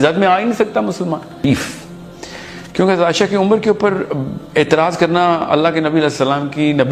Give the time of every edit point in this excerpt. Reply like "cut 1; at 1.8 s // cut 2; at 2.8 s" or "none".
cut 1; at 1.4 s